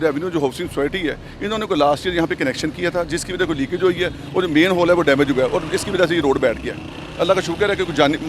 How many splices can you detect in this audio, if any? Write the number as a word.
zero